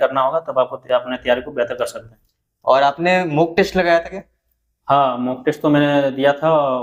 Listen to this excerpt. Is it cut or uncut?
uncut